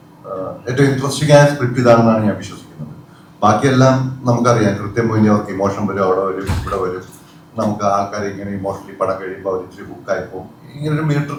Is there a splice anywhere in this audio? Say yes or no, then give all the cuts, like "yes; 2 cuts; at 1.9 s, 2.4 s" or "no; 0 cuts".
no; 0 cuts